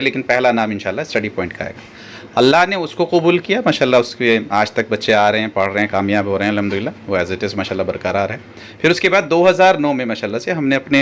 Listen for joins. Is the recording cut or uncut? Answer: uncut